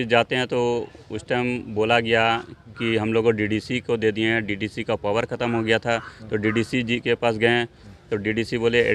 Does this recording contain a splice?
no; 0 cuts

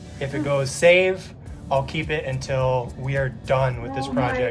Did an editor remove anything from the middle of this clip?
no; 0 cuts

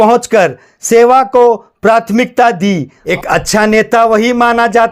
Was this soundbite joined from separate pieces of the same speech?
yes; 1 cut; at 3.0 s

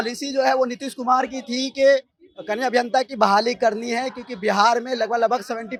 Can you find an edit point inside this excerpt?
no; 0 cuts

